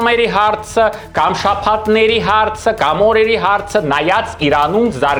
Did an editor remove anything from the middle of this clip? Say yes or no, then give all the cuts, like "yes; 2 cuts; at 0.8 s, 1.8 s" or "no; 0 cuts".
no; 0 cuts